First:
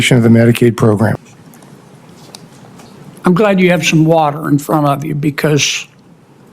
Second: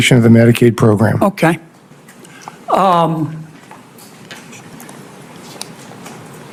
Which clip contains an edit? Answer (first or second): first